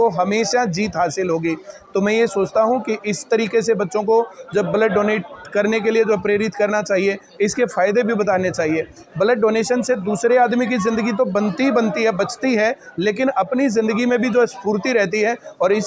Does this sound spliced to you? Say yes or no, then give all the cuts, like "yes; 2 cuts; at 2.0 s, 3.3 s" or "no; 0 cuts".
no; 0 cuts